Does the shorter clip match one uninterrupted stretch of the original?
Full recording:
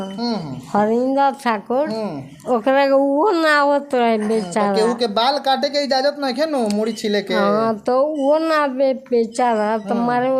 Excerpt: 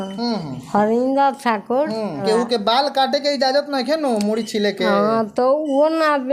no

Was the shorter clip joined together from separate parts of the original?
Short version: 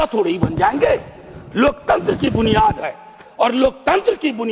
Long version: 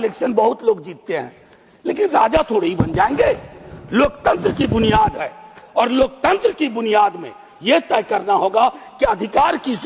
no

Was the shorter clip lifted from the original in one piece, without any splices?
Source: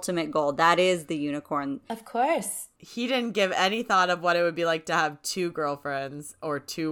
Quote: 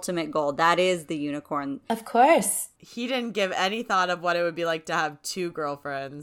yes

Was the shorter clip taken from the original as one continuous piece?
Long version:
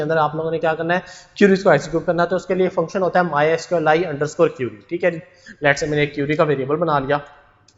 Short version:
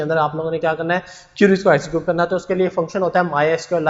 yes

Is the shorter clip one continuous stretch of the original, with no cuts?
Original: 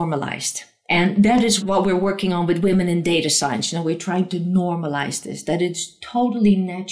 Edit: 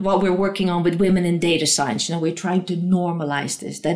yes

